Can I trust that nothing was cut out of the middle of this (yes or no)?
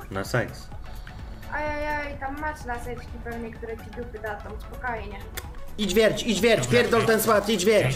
no